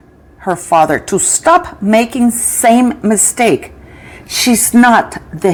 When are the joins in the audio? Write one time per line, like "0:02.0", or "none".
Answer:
none